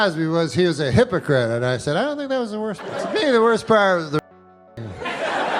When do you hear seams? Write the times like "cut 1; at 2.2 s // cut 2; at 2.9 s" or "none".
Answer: cut 1; at 2.8 s